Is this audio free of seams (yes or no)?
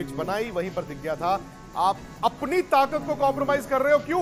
yes